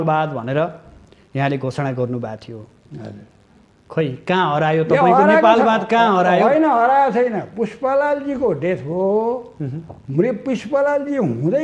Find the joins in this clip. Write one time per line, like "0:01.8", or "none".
none